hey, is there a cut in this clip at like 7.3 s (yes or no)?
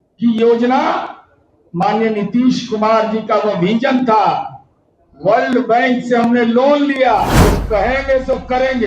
yes